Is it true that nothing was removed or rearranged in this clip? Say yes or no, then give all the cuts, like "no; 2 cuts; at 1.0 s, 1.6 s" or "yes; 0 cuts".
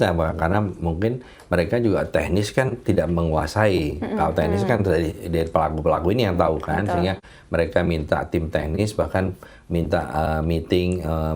yes; 0 cuts